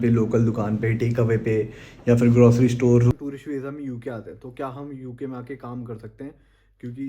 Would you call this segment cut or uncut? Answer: cut